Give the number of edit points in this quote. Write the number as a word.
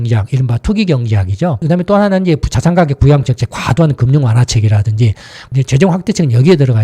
two